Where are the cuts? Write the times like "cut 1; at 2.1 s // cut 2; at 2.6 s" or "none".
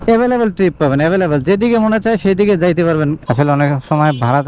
cut 1; at 3.2 s